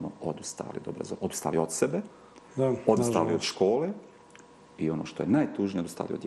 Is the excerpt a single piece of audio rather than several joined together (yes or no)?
yes